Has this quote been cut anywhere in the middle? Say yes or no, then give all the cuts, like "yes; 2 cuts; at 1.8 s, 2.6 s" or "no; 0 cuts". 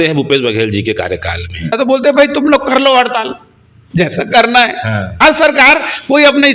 yes; 2 cuts; at 1.7 s, 5.1 s